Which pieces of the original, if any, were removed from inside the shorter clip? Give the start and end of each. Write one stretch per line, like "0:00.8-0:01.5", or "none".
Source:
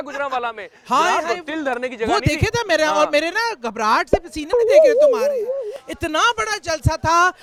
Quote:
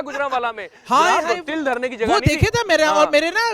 none

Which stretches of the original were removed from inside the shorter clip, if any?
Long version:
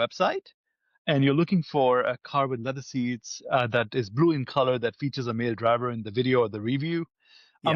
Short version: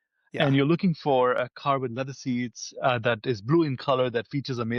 none

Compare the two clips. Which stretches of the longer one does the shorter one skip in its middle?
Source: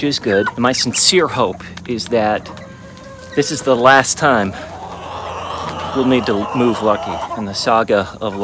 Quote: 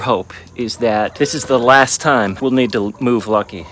0:02.4-0:03.3
0:04.5-0:05.9

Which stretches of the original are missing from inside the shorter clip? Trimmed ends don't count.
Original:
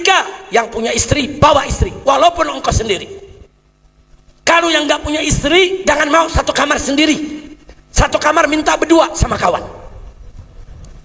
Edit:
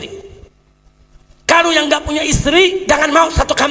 none

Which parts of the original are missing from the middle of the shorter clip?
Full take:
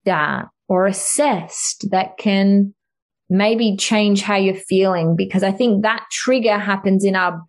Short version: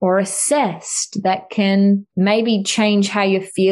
0:02.8-0:03.2

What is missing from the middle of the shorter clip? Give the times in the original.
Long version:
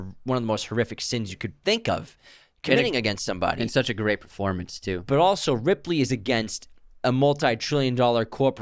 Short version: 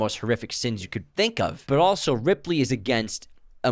0:02.1-0:05.0

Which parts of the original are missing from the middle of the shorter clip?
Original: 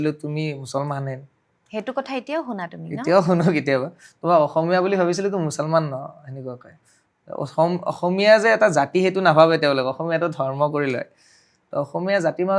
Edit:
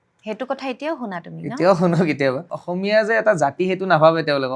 0:04.0-0:07.9

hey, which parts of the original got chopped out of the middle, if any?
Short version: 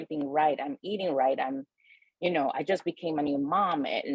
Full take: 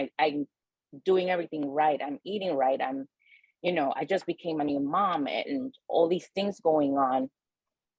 none

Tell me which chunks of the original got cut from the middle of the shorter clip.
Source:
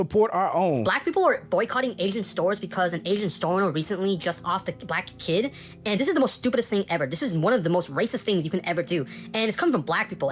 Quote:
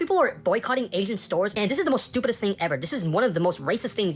0:02.6-0:05.8

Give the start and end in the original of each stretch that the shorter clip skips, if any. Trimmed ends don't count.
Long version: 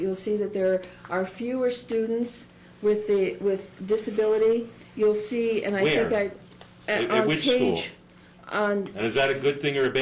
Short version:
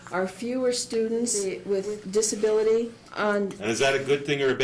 0:02.5-0:03.2
0:04.8-0:08.4

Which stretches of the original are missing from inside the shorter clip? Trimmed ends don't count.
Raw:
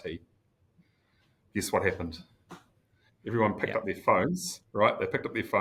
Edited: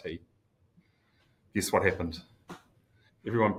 none

